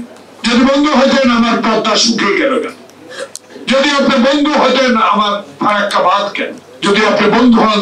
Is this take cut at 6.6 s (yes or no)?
yes